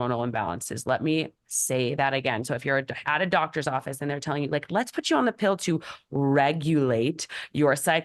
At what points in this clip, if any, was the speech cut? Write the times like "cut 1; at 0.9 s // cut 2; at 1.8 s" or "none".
none

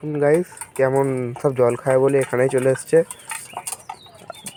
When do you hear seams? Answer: none

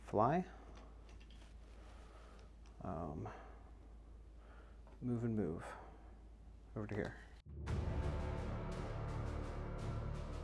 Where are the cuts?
cut 1; at 7.4 s

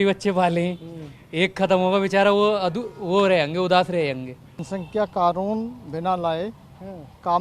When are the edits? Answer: cut 1; at 4.6 s

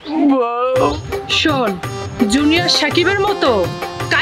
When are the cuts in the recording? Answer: cut 1; at 0.9 s

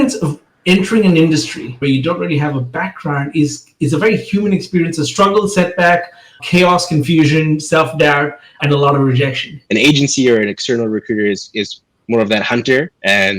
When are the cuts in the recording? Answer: cut 1; at 9.5 s

